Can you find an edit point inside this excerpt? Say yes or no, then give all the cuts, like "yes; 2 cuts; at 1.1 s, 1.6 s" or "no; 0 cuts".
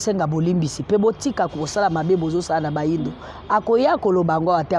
no; 0 cuts